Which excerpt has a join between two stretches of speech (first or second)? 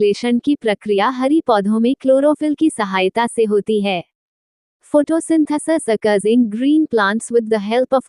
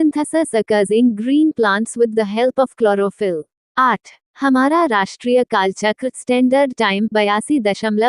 second